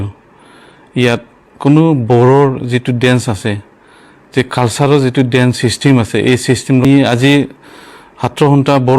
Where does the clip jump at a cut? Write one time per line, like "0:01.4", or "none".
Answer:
0:06.9